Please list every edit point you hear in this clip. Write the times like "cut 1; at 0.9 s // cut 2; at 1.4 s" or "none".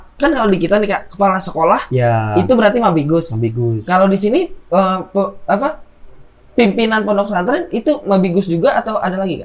none